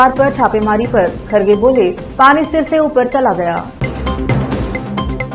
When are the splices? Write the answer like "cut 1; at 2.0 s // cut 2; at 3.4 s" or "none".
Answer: none